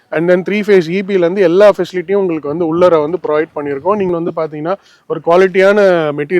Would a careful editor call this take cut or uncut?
cut